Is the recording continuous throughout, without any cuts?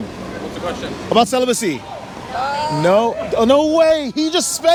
yes; 0 cuts

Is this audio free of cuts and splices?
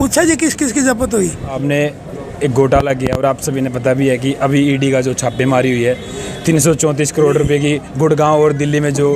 no; 1 cut; at 1.6 s

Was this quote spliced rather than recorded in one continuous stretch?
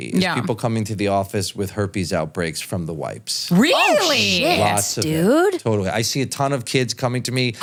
no; 0 cuts

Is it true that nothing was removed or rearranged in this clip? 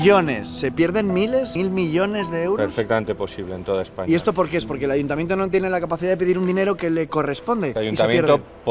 no; 2 cuts; at 1.5 s, 7.7 s

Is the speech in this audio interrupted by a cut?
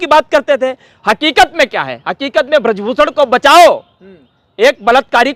no; 0 cuts

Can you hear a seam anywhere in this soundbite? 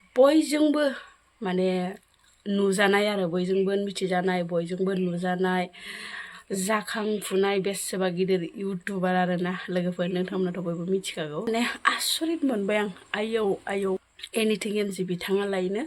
yes; 2 cuts; at 11.5 s, 14.0 s

